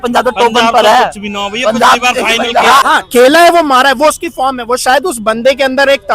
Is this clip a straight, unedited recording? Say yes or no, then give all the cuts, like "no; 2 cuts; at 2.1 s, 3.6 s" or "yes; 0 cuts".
no; 1 cut; at 2.8 s